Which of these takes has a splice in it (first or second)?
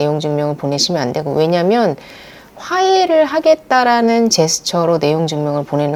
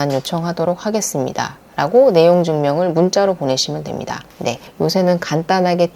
second